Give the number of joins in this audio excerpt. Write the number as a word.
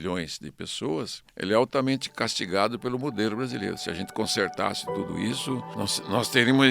two